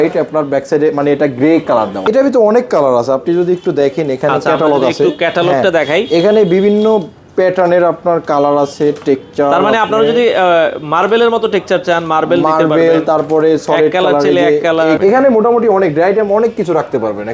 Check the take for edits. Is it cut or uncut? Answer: cut